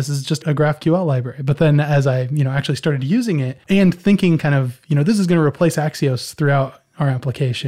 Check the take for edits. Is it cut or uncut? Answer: cut